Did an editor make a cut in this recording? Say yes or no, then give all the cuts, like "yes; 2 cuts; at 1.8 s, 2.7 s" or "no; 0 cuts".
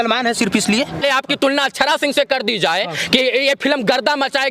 yes; 1 cut; at 1.0 s